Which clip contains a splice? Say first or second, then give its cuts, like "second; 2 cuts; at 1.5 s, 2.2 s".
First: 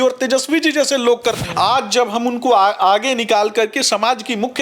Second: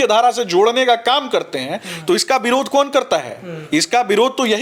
first; 1 cut; at 1.4 s